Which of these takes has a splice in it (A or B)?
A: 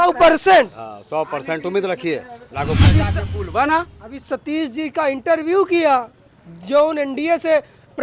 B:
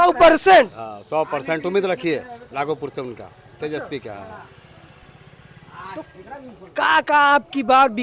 A